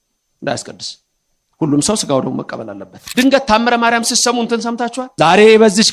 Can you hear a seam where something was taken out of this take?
yes; 2 cuts; at 3.0 s, 5.0 s

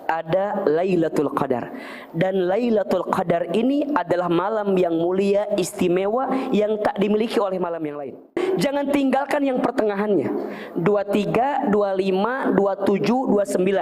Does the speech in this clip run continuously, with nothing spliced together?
no; 1 cut; at 8.4 s

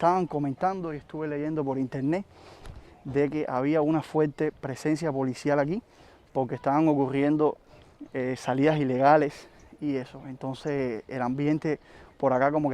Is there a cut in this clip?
no; 0 cuts

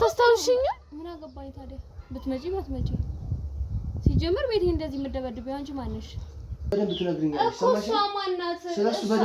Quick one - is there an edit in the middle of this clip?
yes; 1 cut; at 6.7 s

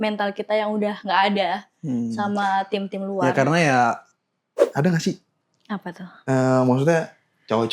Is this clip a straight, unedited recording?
no; 1 cut; at 4.6 s

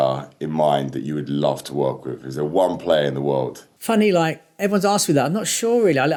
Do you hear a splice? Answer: no; 0 cuts

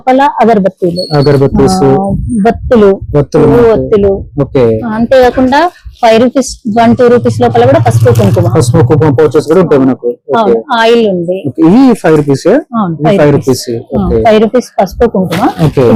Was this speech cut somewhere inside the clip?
no; 0 cuts

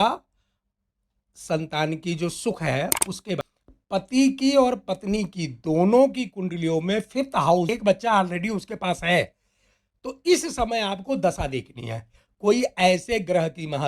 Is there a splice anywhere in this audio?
yes; 2 cuts; at 3.5 s, 7.7 s

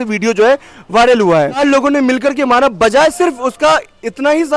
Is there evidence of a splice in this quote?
yes; 1 cut; at 1.6 s

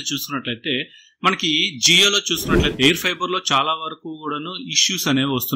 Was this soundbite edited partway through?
yes; 1 cut; at 2.6 s

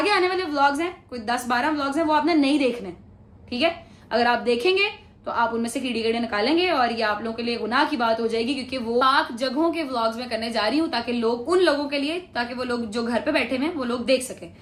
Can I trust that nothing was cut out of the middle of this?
yes; 0 cuts

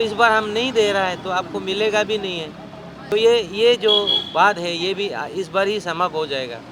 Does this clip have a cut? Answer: no; 0 cuts

